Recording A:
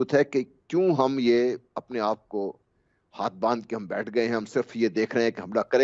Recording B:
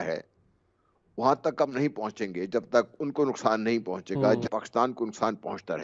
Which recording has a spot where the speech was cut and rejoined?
B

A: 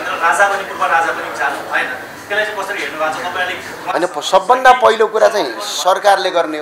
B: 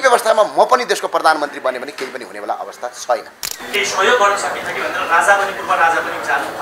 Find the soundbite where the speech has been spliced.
B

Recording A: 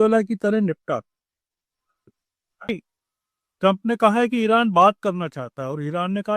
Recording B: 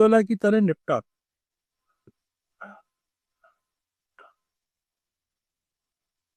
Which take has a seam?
A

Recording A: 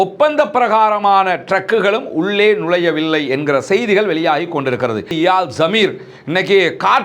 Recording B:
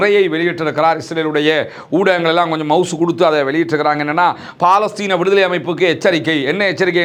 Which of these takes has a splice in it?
A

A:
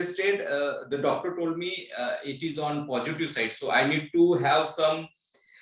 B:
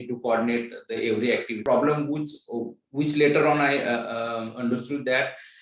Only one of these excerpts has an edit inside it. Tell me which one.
B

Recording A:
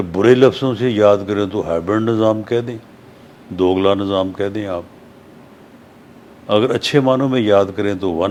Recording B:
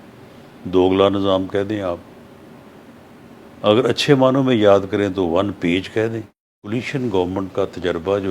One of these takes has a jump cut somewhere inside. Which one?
B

